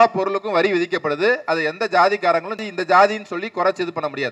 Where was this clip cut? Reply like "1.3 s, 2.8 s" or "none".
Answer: 2.6 s